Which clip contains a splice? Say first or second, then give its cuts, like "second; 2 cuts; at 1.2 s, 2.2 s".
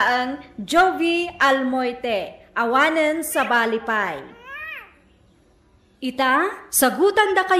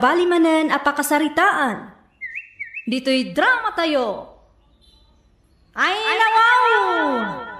first; 2 cuts; at 4.2 s, 6.0 s